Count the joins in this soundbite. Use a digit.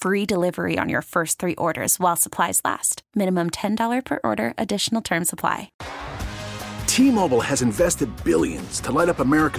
1